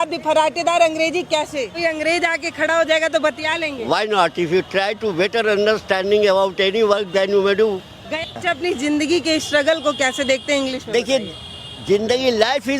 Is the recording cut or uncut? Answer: cut